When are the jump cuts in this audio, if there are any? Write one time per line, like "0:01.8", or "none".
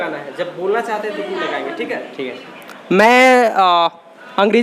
none